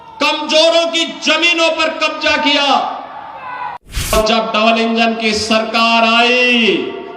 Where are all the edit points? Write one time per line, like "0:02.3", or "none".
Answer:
0:04.1